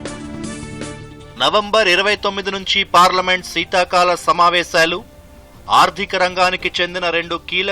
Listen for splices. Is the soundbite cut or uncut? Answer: cut